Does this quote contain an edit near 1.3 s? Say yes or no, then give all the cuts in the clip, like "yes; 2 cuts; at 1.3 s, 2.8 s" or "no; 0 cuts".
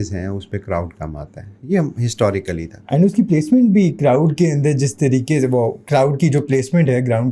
no; 0 cuts